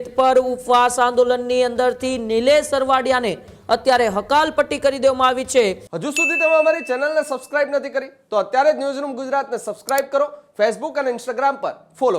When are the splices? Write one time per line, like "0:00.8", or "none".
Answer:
0:05.9